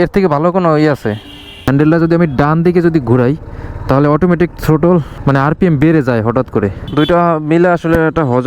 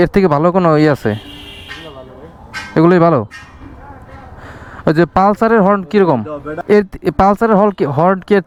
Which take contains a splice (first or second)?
first